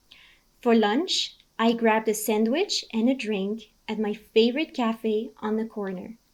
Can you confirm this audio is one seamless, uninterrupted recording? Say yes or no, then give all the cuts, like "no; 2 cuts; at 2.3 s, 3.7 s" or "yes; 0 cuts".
yes; 0 cuts